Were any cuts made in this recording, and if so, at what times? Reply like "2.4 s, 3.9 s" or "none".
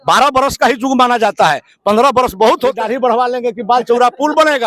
2.8 s